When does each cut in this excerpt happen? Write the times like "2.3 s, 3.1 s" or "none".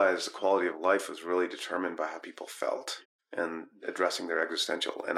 3.1 s